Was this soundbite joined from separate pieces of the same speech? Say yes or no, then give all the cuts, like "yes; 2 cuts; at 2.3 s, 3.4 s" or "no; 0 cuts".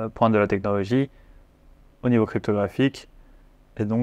no; 0 cuts